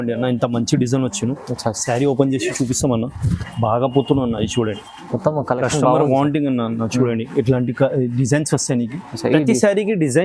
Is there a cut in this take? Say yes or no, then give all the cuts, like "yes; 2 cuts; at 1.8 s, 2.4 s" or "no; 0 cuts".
no; 0 cuts